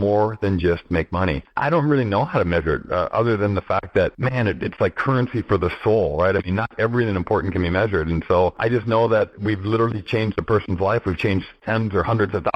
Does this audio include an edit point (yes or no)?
yes